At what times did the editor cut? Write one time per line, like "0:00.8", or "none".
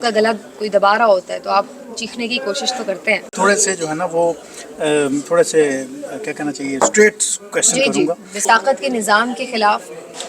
0:03.4
0:08.4

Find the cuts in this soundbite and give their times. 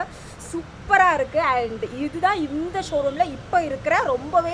none

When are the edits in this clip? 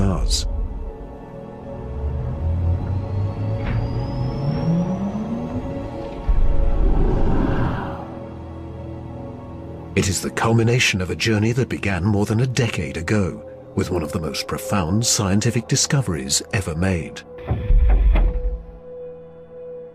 none

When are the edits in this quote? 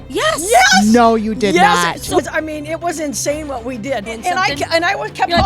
0:02.2
0:04.1

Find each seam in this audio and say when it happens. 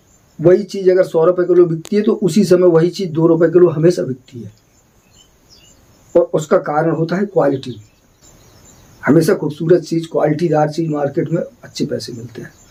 none

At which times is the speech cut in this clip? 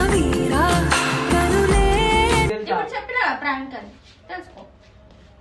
0:02.5

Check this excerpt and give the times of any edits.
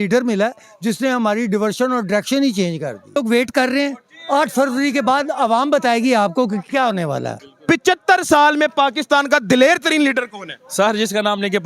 0:03.2
0:07.4

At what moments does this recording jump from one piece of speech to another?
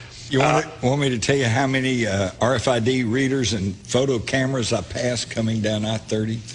0:02.4

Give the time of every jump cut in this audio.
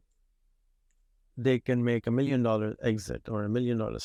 none

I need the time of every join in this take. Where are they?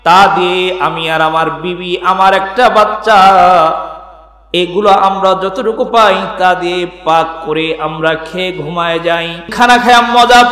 0:09.5

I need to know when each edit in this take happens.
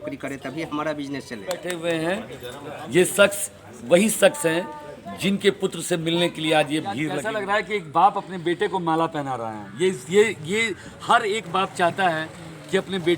0:01.6
0:07.1

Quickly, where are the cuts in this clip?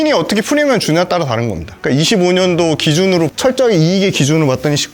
0:03.3

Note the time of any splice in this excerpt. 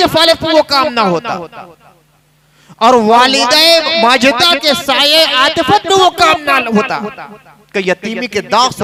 none

